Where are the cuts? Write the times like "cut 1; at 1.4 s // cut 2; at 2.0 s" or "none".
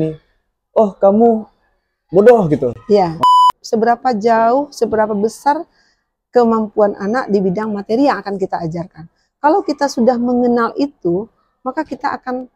cut 1; at 3.2 s